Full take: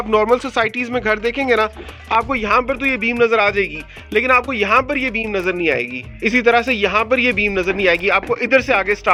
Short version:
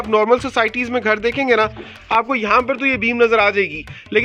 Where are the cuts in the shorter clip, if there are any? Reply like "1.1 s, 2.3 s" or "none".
none